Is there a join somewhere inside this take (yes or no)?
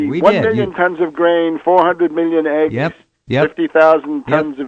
yes